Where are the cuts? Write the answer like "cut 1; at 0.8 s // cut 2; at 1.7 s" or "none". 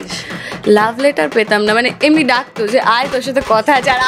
none